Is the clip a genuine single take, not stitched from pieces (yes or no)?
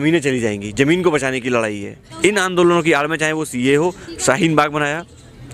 no